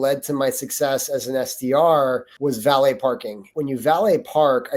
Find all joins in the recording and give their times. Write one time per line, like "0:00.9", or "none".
0:02.3
0:03.4